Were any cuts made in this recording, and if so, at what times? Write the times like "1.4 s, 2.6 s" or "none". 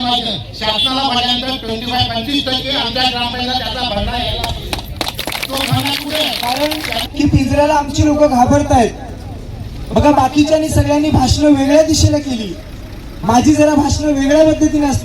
6.5 s